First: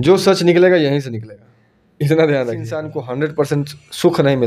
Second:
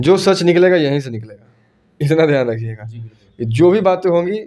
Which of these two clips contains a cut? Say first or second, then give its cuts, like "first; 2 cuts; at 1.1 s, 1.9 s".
first; 1 cut; at 3.0 s